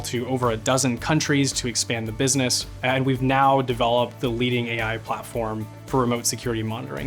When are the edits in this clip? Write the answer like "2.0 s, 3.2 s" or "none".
2.7 s